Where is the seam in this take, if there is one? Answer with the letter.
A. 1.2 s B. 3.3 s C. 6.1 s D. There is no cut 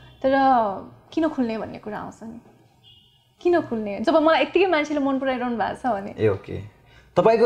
D